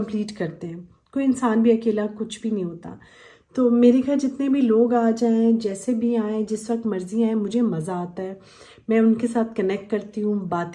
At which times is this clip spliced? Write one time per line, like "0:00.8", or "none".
none